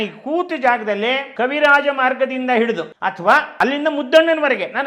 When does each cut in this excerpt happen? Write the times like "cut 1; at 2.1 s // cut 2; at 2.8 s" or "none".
cut 1; at 1.3 s // cut 2; at 2.9 s // cut 3; at 3.5 s